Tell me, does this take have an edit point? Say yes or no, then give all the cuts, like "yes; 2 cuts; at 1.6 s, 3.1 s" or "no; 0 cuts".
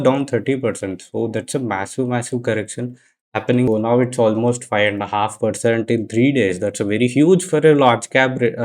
yes; 1 cut; at 3.7 s